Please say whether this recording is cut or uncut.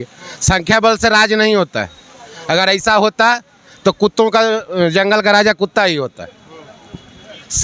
uncut